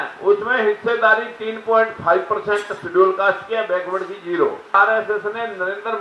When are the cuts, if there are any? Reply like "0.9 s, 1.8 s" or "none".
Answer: 4.7 s